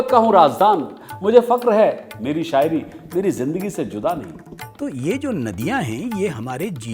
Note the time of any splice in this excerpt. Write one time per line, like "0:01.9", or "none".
0:04.4